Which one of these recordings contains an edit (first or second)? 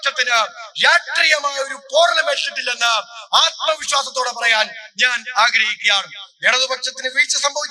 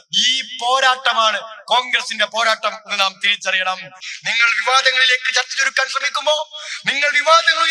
second